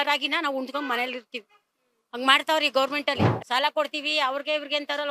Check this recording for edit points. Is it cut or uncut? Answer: cut